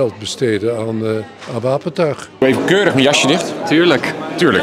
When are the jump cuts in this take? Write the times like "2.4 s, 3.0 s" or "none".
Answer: 2.4 s